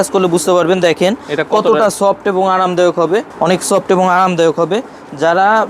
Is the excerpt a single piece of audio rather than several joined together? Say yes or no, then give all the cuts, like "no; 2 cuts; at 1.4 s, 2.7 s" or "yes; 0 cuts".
no; 1 cut; at 3.3 s